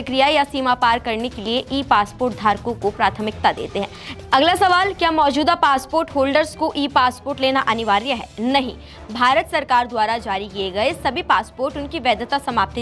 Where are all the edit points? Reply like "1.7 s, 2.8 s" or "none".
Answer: 4.0 s